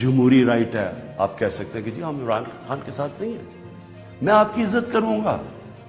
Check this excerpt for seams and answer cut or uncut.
uncut